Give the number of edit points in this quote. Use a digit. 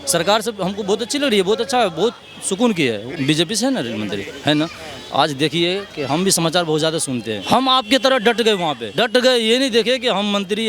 3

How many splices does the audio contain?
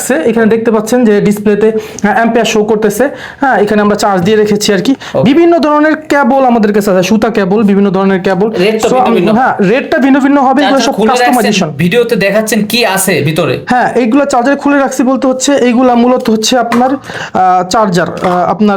0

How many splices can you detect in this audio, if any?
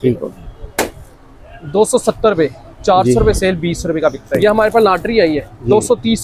1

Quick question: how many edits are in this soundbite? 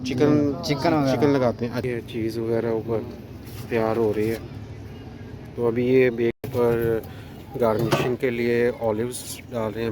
2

